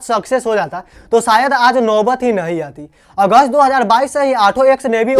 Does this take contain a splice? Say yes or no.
no